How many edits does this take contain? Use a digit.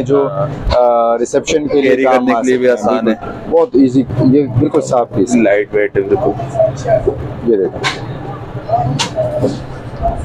0